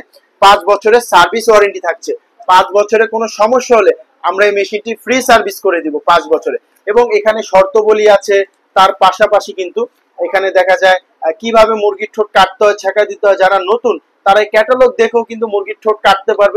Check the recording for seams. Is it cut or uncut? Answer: uncut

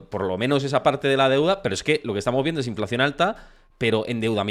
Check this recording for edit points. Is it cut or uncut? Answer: uncut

